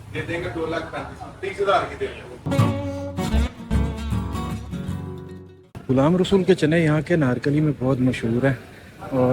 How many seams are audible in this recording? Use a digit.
1